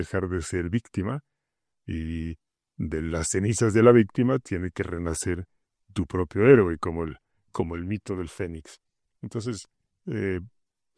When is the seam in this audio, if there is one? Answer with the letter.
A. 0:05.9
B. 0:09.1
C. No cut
C